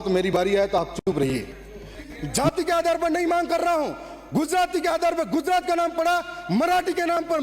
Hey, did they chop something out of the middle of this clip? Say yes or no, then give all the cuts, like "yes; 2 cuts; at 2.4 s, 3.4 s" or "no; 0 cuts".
yes; 1 cut; at 2.1 s